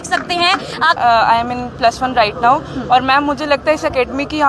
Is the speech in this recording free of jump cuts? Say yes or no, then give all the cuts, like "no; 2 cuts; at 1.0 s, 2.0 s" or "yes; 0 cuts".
no; 1 cut; at 1.0 s